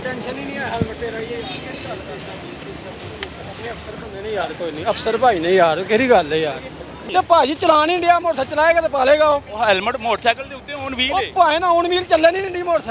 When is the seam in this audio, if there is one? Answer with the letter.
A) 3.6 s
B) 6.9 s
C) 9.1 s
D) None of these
B